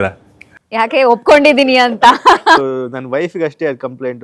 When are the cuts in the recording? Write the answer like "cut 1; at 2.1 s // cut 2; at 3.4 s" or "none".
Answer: cut 1; at 2.6 s